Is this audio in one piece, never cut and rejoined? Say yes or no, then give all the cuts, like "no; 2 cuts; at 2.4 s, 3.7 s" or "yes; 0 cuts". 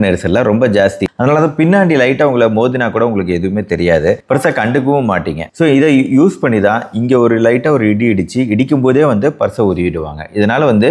no; 1 cut; at 1.1 s